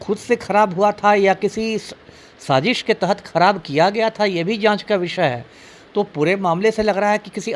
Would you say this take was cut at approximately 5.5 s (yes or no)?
no